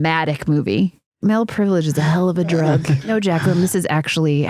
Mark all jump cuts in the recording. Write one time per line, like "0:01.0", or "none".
0:01.2
0:03.0